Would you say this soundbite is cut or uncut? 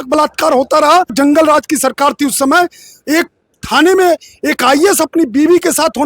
cut